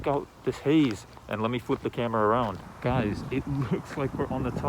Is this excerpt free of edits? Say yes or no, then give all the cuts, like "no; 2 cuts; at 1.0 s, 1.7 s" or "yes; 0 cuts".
no; 1 cut; at 2.7 s